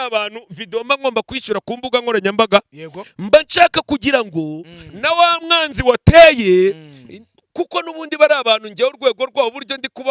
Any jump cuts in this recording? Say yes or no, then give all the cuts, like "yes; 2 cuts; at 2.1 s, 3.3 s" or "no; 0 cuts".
no; 0 cuts